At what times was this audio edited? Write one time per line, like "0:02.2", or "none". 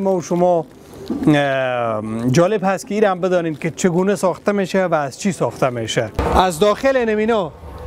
0:06.2